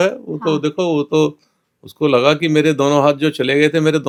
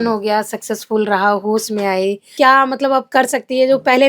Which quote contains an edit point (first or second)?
second